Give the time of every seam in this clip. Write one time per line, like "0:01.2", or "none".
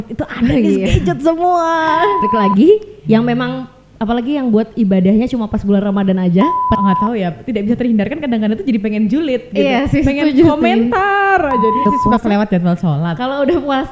0:02.3
0:06.8
0:11.9